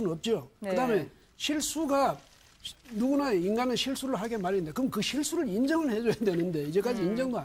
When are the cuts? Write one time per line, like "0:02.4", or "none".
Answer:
0:01.3

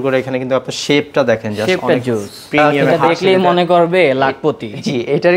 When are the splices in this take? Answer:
0:02.7

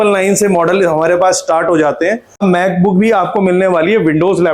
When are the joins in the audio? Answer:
0:02.3

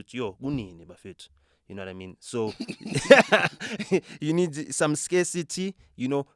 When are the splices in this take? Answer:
none

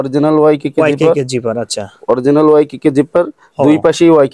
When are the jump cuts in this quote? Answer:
none

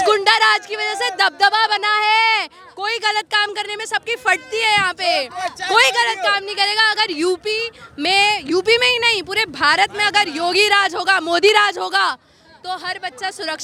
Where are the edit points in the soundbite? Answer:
none

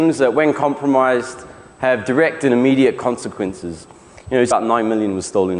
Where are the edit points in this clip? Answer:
none

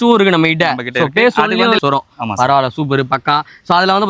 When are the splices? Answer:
0:01.8

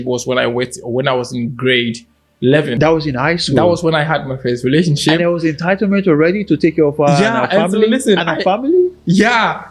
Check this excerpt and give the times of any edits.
0:02.8

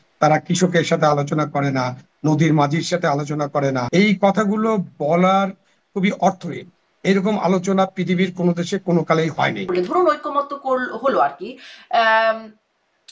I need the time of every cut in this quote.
0:03.8
0:09.6

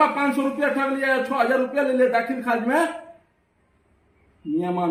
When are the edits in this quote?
none

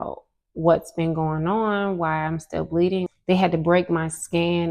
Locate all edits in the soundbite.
0:03.1

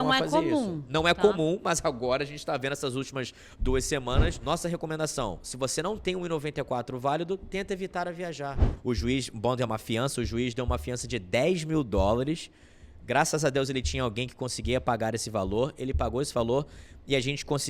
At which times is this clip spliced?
0:04.4
0:08.7

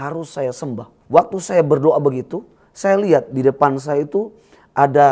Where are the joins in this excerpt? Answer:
0:00.9

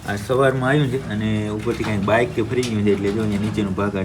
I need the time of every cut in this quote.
none

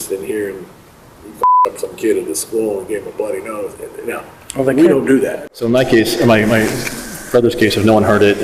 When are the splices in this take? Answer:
0:05.5

